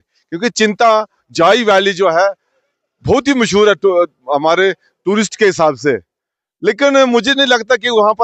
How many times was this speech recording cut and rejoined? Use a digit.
0